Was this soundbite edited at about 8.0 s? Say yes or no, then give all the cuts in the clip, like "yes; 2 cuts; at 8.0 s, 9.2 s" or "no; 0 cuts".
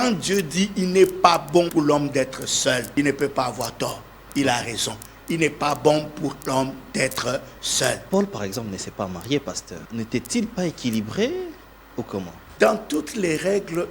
yes; 5 cuts; at 1.7 s, 2.9 s, 8.0 s, 9.7 s, 12.4 s